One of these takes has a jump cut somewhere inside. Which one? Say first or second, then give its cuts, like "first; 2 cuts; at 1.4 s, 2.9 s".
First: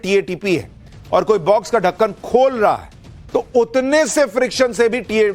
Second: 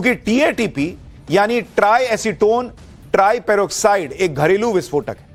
first; 1 cut; at 2.2 s